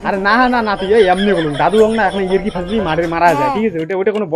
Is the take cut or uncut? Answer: uncut